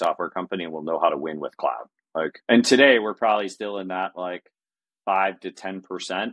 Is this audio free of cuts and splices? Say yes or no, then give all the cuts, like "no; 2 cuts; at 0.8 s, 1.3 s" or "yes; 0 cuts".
no; 1 cut; at 2.4 s